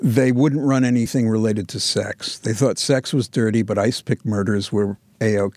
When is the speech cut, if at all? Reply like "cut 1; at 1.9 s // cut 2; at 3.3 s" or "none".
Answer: cut 1; at 1.1 s

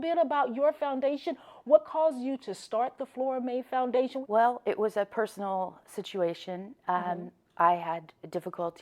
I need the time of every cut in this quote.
cut 1; at 4.2 s

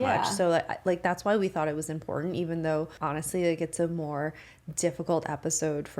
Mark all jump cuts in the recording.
cut 1; at 2.9 s

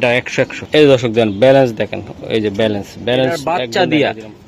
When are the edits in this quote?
cut 1; at 3.6 s

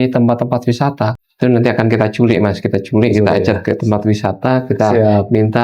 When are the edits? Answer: cut 1; at 1.4 s

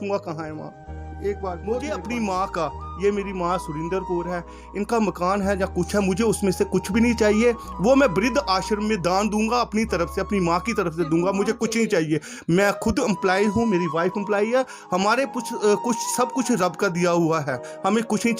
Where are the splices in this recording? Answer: cut 1; at 2.0 s

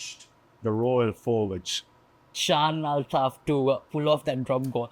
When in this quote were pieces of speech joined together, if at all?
cut 1; at 2.4 s

